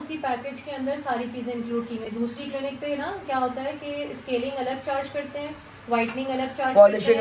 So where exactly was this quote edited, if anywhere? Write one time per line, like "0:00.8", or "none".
none